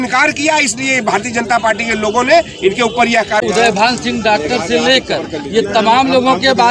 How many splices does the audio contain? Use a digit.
1